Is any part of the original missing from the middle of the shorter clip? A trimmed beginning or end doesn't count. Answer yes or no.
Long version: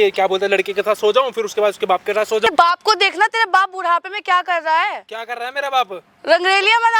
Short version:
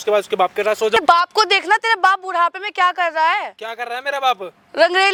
no